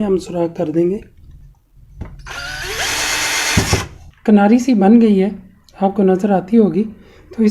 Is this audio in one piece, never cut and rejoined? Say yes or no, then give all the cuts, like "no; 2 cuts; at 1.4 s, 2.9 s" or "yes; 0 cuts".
no; 1 cut; at 4.0 s